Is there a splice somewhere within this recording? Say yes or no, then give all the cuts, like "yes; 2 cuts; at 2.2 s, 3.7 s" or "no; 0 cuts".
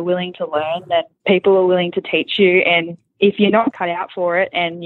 yes; 1 cut; at 3.7 s